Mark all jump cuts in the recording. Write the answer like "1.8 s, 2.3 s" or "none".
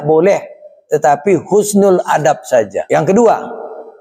2.8 s